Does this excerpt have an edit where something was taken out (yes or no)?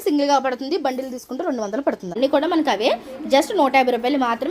yes